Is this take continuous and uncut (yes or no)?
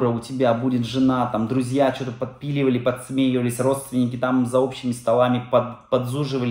yes